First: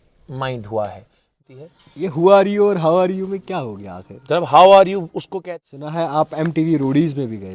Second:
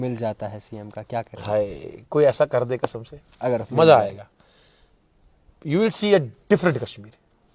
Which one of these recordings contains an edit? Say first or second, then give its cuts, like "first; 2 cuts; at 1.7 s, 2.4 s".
first; 2 cuts; at 1.3 s, 5.4 s